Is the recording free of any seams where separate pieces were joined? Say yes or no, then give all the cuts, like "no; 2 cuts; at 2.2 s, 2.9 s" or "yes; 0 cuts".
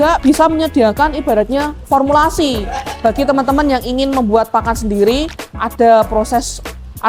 yes; 0 cuts